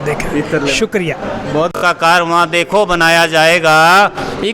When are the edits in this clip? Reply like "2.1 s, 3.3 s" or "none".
1.7 s